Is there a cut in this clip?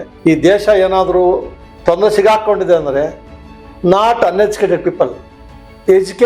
no; 0 cuts

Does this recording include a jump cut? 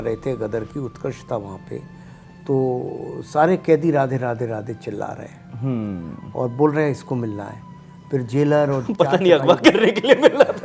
no; 0 cuts

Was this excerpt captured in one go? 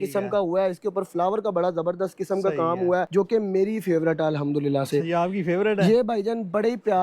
no; 1 cut; at 3.1 s

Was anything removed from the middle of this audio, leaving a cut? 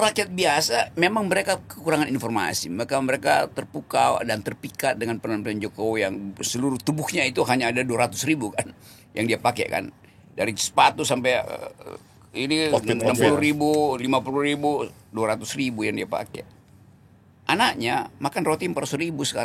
no; 0 cuts

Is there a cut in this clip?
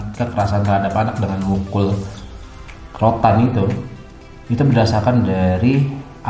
no; 0 cuts

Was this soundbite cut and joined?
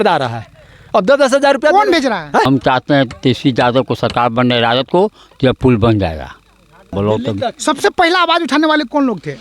yes; 2 cuts; at 2.5 s, 6.9 s

